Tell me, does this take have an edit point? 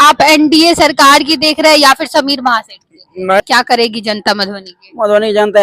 yes; 1 cut; at 3.4 s

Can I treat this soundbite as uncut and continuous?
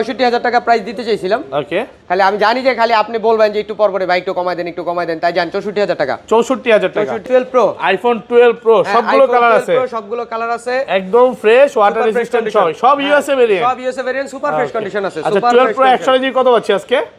no; 1 cut; at 7.2 s

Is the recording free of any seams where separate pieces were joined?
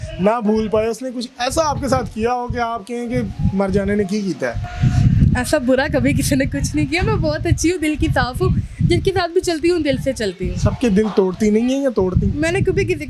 yes; 0 cuts

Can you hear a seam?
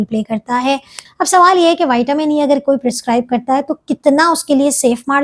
yes; 1 cut; at 1.0 s

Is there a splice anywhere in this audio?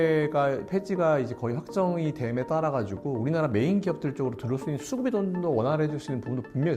no; 0 cuts

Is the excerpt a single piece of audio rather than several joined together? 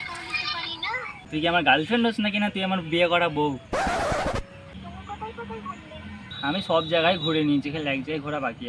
no; 3 cuts; at 1.2 s, 4.7 s, 6.5 s

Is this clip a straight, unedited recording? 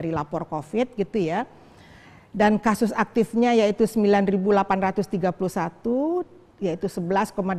yes; 0 cuts

